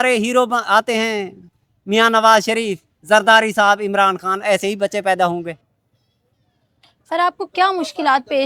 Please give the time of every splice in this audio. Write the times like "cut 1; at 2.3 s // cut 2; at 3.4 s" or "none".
none